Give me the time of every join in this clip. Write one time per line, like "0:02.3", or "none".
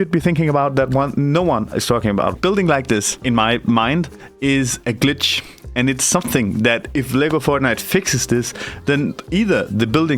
0:02.4
0:03.1
0:04.2